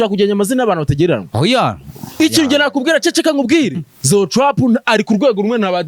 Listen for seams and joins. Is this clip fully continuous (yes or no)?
no